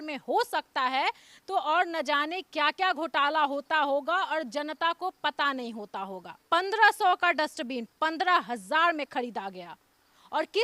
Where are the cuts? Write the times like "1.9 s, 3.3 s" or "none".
6.4 s